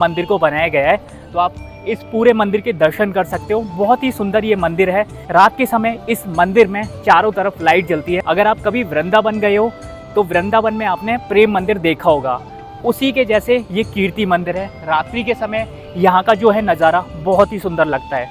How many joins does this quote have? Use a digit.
0